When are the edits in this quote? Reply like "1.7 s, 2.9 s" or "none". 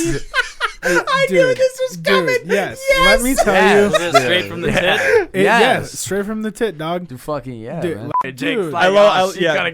8.2 s